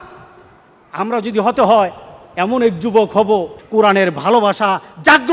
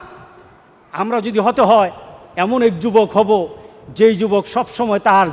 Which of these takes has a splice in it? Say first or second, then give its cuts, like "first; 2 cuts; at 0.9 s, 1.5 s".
first; 1 cut; at 3.6 s